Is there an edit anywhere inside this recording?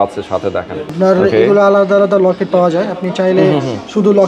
no; 0 cuts

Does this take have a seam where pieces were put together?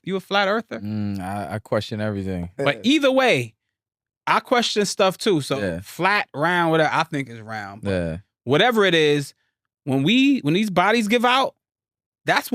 yes; 1 cut; at 2.5 s

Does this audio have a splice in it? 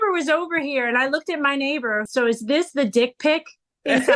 yes; 1 cut; at 2.1 s

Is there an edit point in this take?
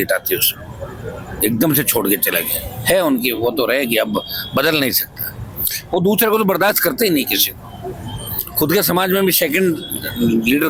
no; 0 cuts

